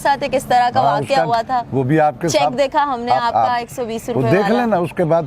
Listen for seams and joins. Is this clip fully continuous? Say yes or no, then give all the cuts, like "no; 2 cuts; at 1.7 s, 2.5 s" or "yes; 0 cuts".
yes; 0 cuts